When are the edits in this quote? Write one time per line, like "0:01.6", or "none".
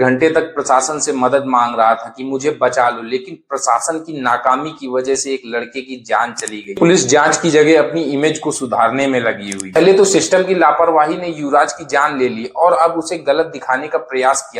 0:06.8
0:09.8